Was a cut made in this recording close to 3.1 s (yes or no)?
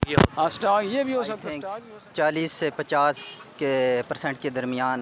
no